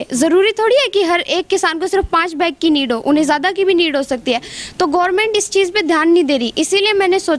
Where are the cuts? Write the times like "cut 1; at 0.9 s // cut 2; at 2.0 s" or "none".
none